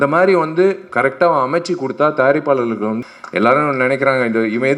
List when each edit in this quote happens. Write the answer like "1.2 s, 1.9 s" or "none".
3.0 s

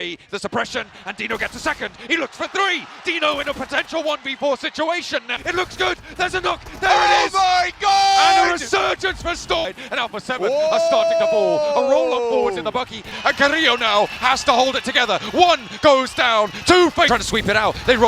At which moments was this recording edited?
5.3 s, 9.6 s, 13.1 s, 17.1 s

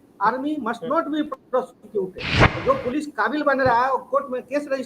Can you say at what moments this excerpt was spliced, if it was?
2.4 s

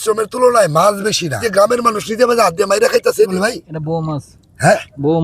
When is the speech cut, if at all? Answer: 1.4 s, 3.3 s

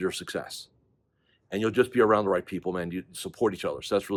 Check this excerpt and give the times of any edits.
none

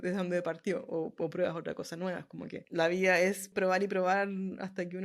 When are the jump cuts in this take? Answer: 2.6 s, 3.5 s

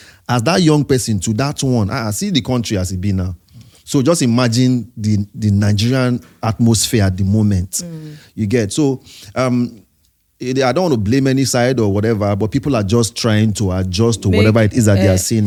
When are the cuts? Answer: none

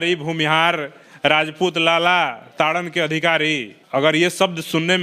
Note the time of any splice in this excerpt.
3.7 s

